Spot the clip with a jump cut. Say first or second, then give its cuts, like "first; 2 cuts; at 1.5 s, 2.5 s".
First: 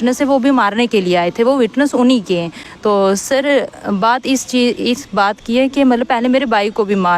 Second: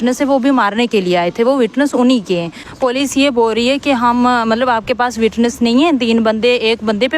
second; 1 cut; at 2.6 s